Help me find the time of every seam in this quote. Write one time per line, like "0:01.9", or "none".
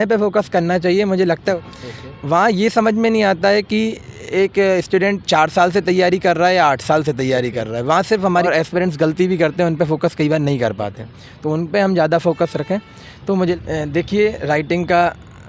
0:01.6
0:08.5
0:13.5